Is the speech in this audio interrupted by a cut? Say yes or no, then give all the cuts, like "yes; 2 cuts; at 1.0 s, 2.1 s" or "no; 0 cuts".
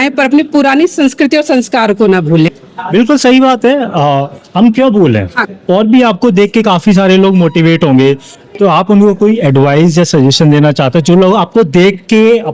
yes; 2 cuts; at 2.5 s, 5.4 s